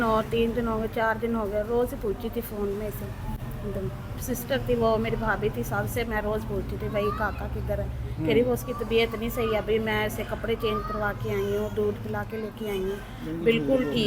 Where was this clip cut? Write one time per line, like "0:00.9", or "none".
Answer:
none